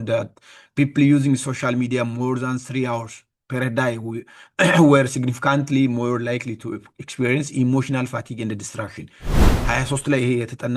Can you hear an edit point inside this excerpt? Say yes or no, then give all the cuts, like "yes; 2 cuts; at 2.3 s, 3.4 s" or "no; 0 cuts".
yes; 1 cut; at 9.3 s